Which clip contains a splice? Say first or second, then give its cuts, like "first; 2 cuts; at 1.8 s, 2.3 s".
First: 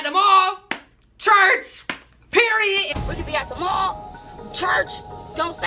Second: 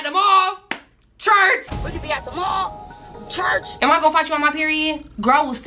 second; 2 cuts; at 1.8 s, 3.7 s